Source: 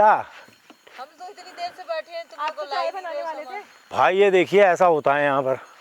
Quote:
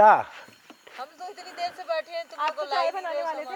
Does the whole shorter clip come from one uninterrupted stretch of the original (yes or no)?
yes